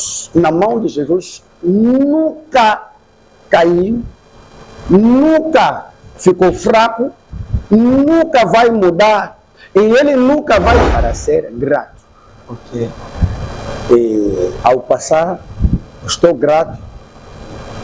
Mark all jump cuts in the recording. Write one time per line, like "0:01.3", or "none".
0:10.9